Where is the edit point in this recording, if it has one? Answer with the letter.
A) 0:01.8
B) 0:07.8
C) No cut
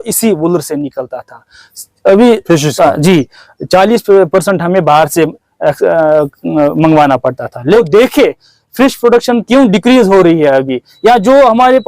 B